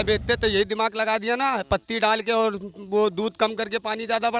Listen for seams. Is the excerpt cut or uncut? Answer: uncut